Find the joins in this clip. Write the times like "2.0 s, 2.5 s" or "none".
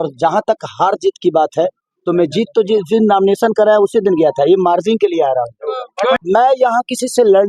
6.2 s